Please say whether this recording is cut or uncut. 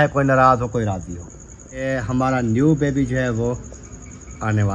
cut